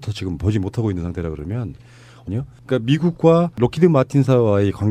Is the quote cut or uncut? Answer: uncut